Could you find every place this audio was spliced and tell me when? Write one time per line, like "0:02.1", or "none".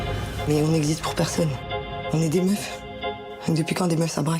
none